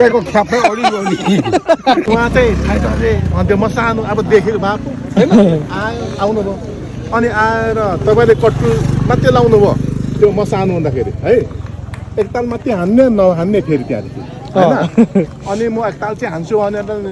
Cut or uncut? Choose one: cut